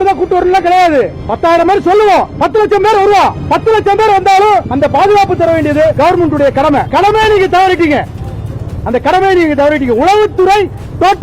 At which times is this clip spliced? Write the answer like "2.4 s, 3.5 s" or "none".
none